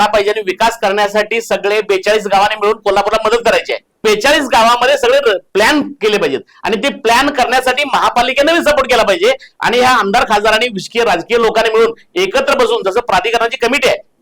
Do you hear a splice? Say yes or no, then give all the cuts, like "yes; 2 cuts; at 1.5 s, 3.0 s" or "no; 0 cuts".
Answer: yes; 1 cut; at 4.0 s